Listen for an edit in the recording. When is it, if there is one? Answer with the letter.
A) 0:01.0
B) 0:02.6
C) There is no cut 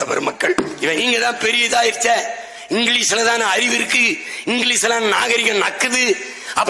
A